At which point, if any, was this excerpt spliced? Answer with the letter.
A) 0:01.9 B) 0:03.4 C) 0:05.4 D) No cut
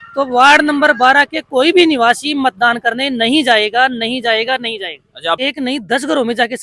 C